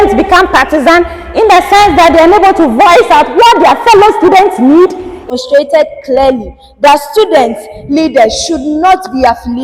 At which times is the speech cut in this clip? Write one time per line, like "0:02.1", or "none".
0:05.1

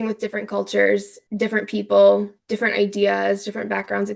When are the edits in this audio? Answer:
0:01.2

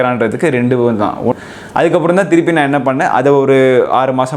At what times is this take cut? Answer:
0:01.3

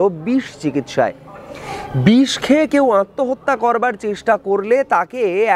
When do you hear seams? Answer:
none

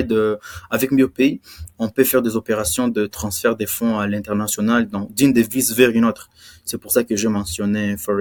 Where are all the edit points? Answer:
none

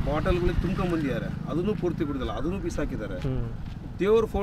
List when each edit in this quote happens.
none

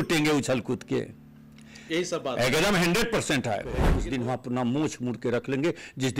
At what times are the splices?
0:04.0

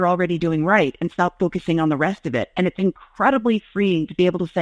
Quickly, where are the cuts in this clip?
none

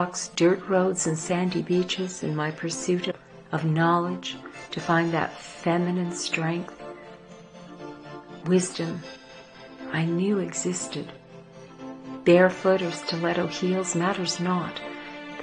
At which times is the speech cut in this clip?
0:03.1

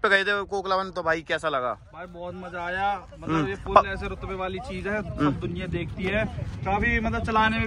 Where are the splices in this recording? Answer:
none

